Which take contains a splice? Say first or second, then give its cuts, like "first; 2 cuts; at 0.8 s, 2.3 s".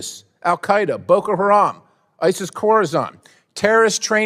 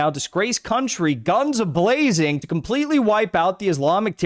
second; 1 cut; at 2.5 s